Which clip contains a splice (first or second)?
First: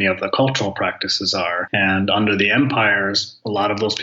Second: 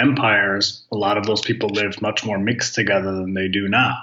first